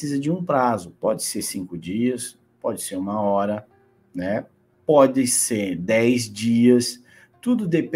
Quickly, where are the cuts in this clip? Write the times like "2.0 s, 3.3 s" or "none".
none